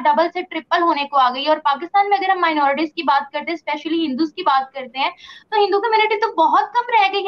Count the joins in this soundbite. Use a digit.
0